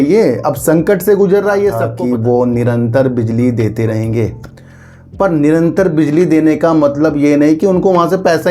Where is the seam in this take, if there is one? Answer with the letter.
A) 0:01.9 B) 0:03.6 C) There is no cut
A